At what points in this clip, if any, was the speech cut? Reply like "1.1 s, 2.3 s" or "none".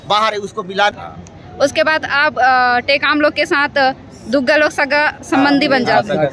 0.9 s